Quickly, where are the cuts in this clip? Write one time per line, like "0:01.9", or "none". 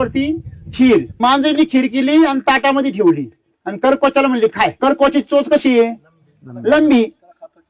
0:01.2
0:04.8